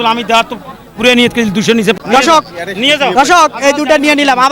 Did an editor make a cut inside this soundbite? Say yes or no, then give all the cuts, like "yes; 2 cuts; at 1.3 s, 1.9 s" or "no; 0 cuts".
yes; 1 cut; at 2.0 s